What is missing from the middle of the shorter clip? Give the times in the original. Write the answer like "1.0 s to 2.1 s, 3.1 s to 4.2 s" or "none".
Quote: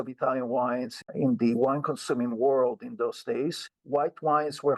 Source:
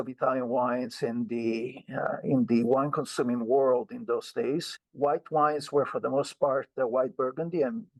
1.0 s to 2.1 s